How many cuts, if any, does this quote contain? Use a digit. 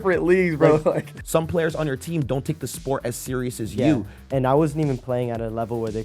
2